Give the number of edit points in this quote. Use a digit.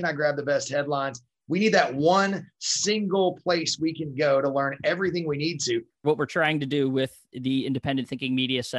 2